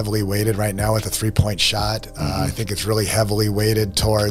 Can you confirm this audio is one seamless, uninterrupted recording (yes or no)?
yes